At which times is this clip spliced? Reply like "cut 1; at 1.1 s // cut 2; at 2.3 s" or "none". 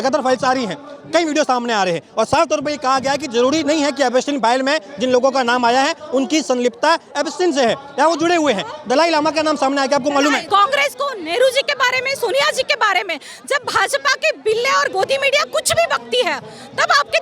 cut 1; at 10.4 s